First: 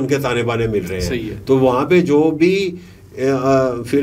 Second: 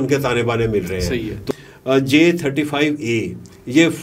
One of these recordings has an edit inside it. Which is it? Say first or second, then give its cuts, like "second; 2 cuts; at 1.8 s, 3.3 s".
second; 1 cut; at 1.4 s